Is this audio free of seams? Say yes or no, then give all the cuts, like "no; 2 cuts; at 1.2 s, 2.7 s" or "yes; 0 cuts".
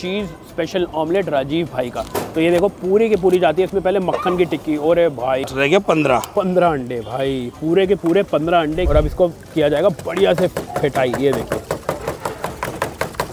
no; 2 cuts; at 5.5 s, 8.9 s